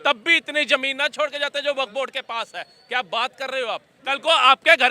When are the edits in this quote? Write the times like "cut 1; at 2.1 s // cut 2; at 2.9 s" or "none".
cut 1; at 3.9 s